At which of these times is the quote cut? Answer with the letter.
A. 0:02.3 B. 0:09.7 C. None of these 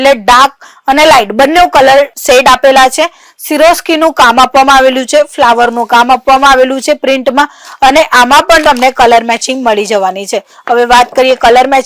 C